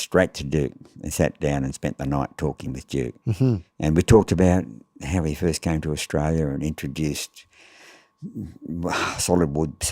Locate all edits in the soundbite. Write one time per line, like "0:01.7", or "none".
0:03.7